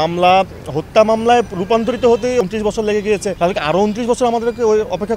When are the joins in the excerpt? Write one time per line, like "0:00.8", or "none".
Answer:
0:02.4